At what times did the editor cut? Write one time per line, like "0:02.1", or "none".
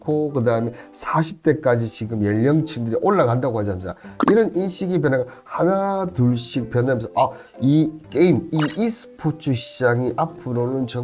none

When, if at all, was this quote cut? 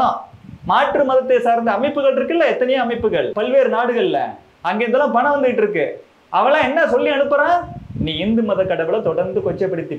0:03.3

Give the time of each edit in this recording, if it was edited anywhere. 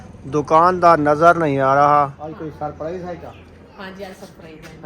0:02.2

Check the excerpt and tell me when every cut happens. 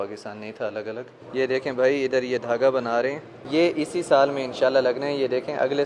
0:01.1
0:03.4

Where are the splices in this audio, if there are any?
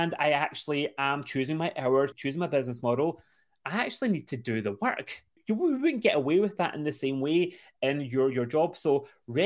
0:02.2
0:05.3

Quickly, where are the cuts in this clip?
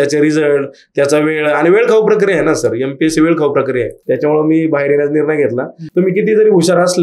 0:04.0
0:05.8

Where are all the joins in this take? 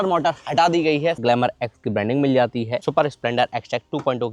0:01.2
0:02.8

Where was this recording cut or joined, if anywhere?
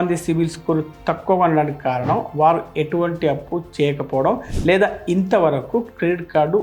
none

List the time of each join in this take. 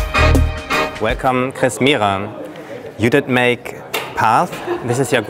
none

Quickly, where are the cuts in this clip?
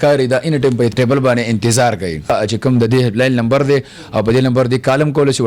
0:00.9
0:02.3

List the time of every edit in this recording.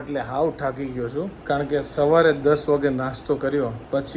none

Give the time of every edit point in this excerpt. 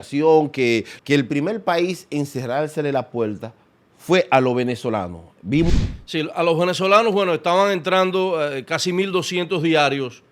0:00.9
0:05.7

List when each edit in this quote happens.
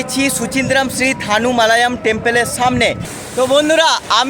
0:03.2

